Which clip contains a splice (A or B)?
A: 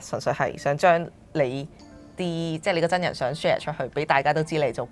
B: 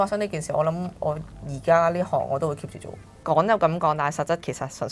B